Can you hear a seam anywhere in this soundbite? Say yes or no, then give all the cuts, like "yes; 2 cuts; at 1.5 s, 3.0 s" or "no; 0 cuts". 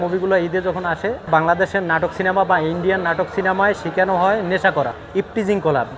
yes; 2 cuts; at 1.2 s, 5.0 s